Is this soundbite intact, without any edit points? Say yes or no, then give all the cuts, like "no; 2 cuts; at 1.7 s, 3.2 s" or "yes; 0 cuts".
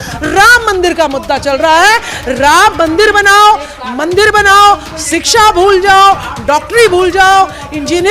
yes; 0 cuts